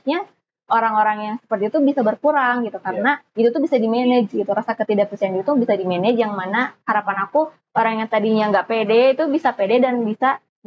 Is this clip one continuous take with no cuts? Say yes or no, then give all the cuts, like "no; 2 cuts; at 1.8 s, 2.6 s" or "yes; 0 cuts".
yes; 0 cuts